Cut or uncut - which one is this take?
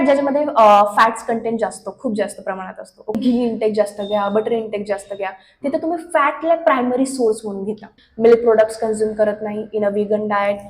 cut